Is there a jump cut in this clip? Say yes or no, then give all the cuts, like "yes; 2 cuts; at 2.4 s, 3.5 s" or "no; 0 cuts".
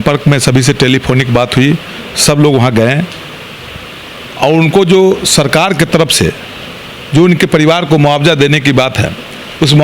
no; 0 cuts